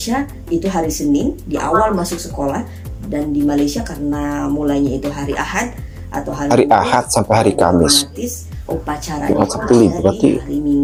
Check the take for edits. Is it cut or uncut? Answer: uncut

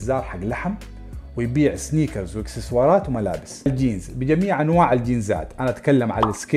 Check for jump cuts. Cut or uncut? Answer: cut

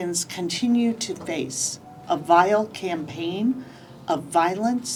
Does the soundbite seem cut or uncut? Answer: uncut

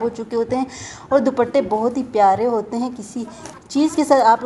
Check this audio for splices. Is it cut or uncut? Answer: uncut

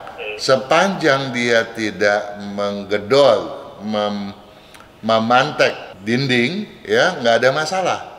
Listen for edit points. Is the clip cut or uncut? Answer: cut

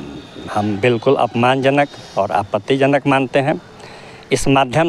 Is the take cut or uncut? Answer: uncut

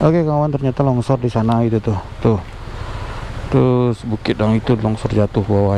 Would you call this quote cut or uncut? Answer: uncut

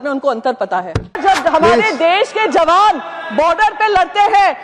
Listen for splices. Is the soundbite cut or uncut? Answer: cut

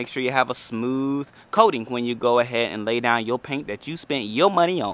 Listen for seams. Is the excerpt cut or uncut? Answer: uncut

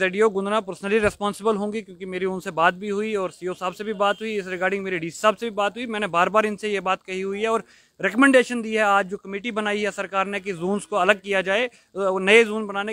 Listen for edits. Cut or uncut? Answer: uncut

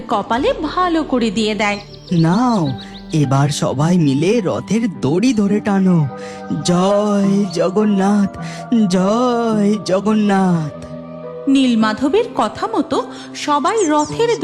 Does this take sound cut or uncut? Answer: cut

